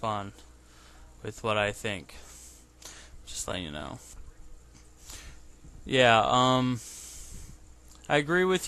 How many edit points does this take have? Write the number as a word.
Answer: one